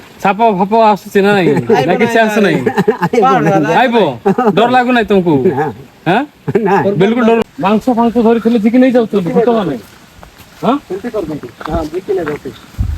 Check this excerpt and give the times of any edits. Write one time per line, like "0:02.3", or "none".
0:07.4